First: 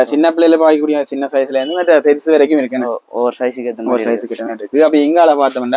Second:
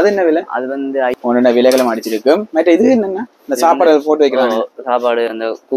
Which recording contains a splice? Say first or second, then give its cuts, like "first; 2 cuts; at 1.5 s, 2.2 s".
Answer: second; 1 cut; at 1.1 s